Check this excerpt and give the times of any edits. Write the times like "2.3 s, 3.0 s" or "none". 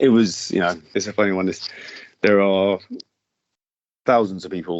0.9 s